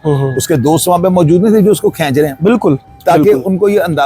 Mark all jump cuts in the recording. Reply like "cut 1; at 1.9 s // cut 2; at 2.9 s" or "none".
cut 1; at 2.9 s